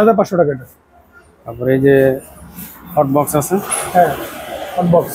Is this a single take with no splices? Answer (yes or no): yes